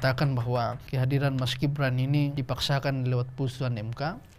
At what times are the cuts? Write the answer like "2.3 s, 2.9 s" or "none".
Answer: 0.8 s, 2.4 s

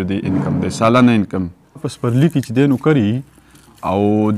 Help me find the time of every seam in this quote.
1.9 s

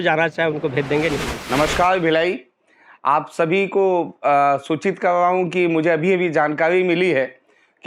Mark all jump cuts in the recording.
none

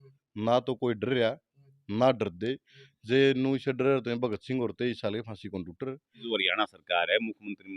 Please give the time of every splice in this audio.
6.2 s

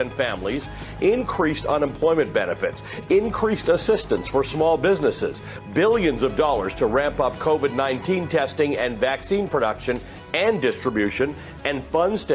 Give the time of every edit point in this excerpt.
none

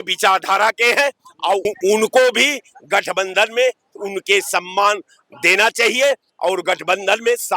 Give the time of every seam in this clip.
1.6 s

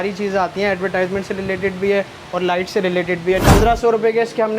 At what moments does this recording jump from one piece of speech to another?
3.4 s

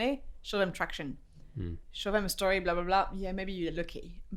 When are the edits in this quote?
none

